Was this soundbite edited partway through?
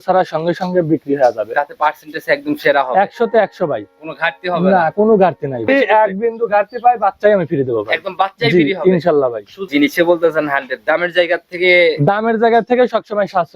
yes; 2 cuts; at 5.7 s, 9.6 s

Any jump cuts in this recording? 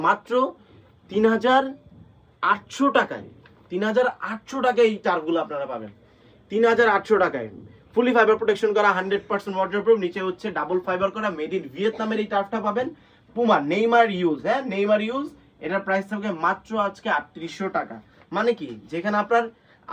no; 0 cuts

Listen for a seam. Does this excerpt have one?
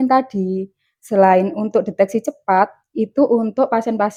no; 0 cuts

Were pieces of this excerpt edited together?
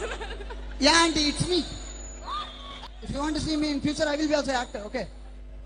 yes; 1 cut; at 2.8 s

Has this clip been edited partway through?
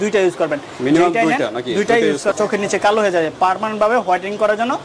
yes; 1 cut; at 2.3 s

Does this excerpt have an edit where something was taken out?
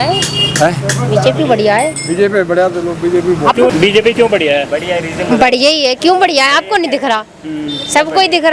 no; 0 cuts

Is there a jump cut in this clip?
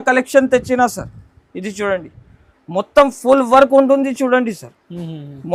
no; 0 cuts

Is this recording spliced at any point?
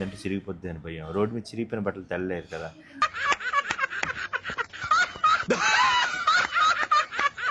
no; 0 cuts

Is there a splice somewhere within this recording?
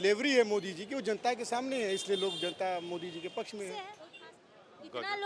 yes; 1 cut; at 4.0 s

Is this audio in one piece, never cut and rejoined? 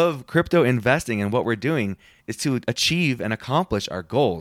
no; 1 cut; at 2.4 s

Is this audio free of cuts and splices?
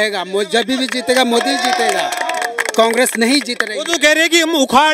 yes; 0 cuts

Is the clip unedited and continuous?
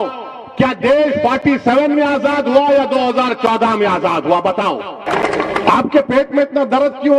no; 1 cut; at 5.0 s

